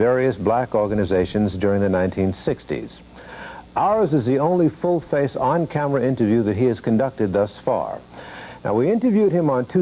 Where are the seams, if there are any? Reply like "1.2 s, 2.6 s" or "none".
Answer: 3.0 s